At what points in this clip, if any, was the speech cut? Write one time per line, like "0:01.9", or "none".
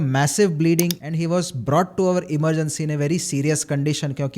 0:01.0